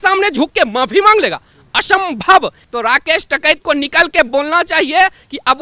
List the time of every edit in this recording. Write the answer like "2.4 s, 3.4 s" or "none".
2.6 s